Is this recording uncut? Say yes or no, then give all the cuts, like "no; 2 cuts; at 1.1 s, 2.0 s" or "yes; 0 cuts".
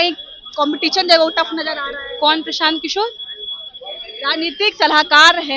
yes; 0 cuts